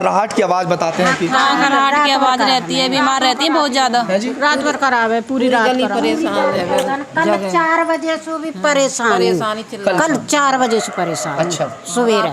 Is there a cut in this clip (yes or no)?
no